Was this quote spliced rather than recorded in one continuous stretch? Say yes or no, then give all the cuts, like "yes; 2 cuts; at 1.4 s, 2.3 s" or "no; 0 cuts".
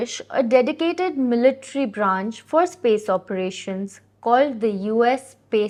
no; 0 cuts